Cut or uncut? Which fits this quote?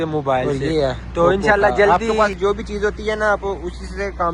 cut